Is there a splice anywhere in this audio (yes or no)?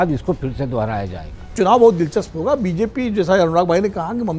yes